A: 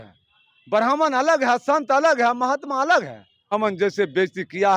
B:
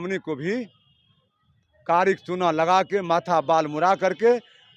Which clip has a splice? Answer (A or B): A